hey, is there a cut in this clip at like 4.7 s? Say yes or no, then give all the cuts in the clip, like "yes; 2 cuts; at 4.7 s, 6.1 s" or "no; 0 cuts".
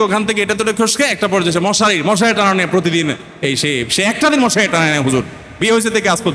no; 0 cuts